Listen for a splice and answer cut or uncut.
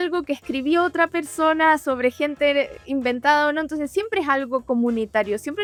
uncut